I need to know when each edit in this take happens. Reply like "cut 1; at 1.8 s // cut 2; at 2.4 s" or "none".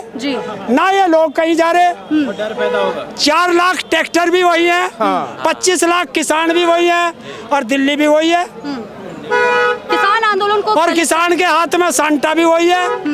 none